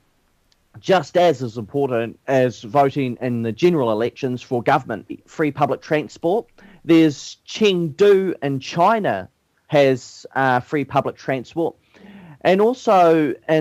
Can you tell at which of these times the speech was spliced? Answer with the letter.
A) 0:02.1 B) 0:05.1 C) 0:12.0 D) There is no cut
D